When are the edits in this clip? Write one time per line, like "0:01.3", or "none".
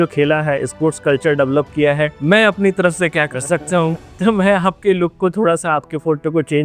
none